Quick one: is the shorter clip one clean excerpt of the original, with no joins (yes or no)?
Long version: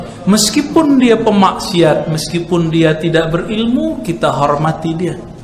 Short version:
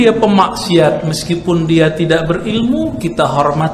yes